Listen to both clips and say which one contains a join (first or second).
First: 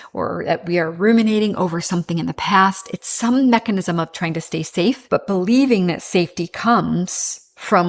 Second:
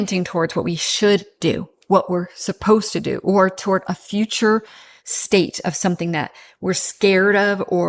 first